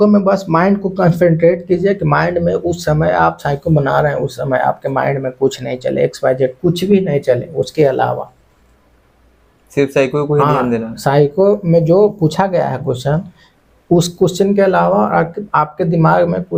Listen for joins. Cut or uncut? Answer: uncut